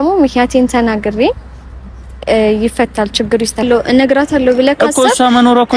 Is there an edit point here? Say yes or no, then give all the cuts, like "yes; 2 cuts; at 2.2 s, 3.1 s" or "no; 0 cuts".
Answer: yes; 1 cut; at 3.6 s